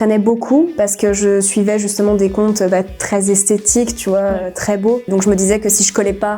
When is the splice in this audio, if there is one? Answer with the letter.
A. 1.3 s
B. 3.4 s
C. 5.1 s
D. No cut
C